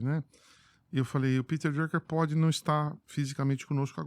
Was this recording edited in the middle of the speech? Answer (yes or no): no